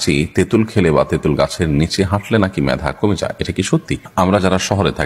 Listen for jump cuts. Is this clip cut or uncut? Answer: cut